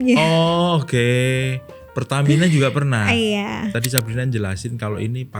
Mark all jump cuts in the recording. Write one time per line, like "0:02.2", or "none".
0:03.7